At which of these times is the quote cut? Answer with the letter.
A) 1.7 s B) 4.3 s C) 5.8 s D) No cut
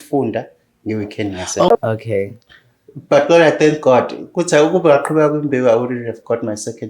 A